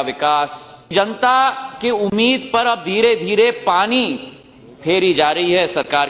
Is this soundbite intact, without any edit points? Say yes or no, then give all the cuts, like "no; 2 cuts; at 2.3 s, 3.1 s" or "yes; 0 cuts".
no; 1 cut; at 0.9 s